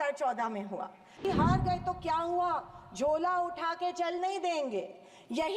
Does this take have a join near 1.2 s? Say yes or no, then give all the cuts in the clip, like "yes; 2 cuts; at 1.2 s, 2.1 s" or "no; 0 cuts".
yes; 1 cut; at 1.2 s